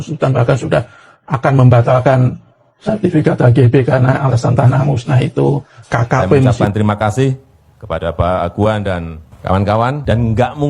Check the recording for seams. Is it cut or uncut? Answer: cut